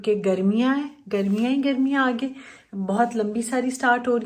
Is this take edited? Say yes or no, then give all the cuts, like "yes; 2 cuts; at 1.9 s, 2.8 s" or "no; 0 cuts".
no; 0 cuts